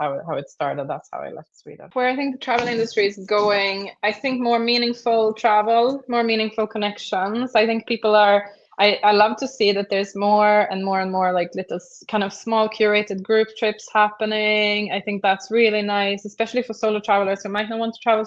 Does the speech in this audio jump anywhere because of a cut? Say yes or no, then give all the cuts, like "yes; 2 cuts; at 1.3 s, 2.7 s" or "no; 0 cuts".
yes; 1 cut; at 1.9 s